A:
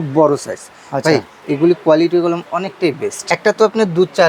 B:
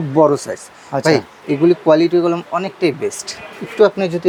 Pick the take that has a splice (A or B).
A